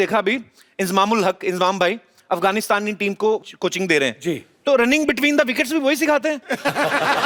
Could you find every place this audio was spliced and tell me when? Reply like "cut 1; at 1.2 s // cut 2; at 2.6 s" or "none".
none